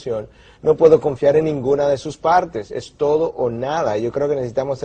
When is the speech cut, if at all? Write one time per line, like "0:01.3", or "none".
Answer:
none